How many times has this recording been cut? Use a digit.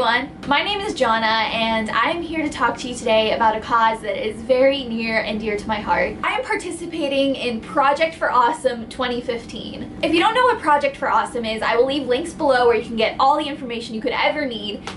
0